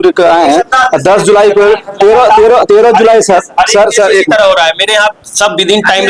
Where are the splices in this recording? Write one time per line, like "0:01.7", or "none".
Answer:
none